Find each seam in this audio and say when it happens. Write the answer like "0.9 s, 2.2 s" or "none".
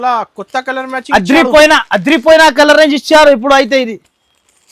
none